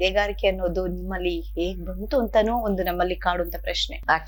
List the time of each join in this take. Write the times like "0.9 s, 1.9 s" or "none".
none